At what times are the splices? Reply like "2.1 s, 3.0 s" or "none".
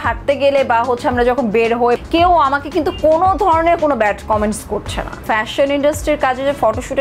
2.0 s, 5.2 s